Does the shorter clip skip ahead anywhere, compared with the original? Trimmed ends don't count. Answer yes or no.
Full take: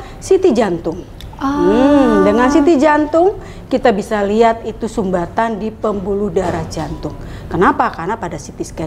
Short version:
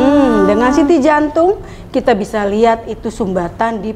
no